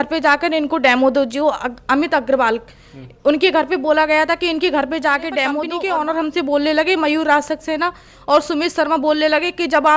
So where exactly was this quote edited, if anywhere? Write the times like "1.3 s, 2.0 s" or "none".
5.7 s